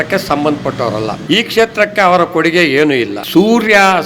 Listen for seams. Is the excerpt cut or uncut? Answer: cut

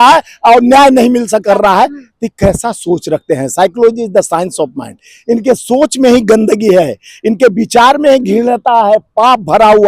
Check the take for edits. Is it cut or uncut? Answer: cut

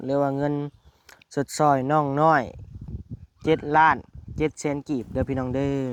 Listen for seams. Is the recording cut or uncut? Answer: uncut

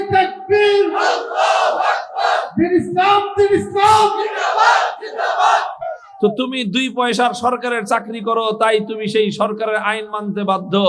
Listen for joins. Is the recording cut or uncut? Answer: cut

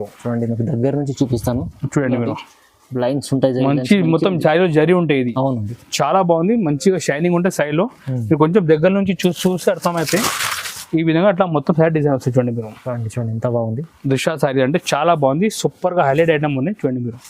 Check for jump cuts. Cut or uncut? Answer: uncut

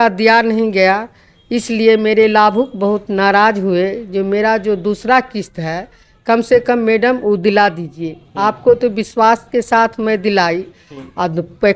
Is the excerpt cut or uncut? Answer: uncut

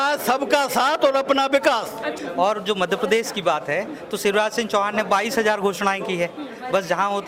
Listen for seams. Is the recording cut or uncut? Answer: cut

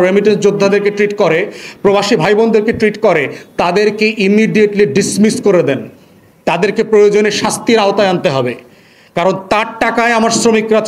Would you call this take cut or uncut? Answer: uncut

